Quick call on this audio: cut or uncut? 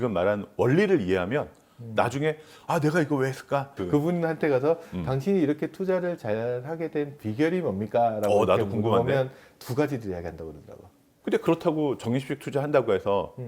cut